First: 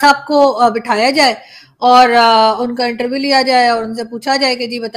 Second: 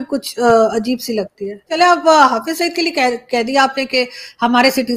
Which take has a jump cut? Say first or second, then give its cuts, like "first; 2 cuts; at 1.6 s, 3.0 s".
second; 1 cut; at 1.7 s